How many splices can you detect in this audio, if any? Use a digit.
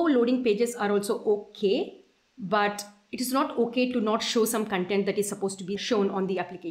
1